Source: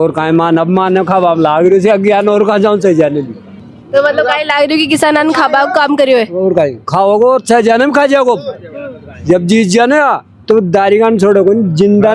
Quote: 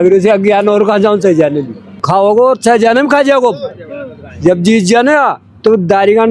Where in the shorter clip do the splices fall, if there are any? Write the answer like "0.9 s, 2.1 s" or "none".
2.0 s